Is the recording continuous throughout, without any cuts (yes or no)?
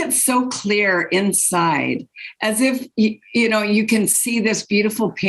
yes